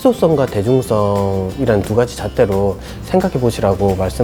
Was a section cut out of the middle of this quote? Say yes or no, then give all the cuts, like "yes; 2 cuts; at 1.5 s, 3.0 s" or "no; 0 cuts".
no; 0 cuts